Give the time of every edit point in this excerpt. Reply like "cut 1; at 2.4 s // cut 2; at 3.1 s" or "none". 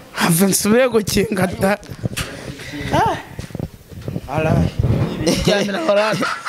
cut 1; at 5.2 s